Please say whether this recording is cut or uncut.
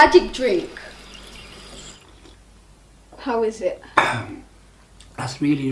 cut